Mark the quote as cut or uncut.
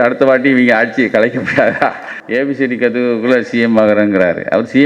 cut